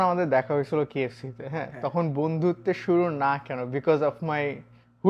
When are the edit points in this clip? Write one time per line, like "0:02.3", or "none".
none